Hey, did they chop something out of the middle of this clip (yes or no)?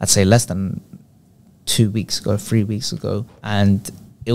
yes